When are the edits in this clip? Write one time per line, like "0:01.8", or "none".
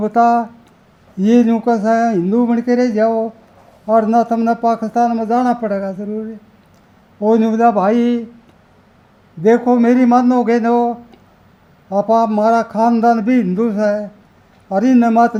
none